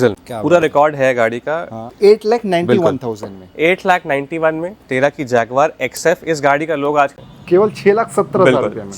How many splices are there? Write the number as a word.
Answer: two